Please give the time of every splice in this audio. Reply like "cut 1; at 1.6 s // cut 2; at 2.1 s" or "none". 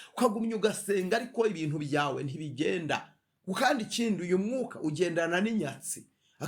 none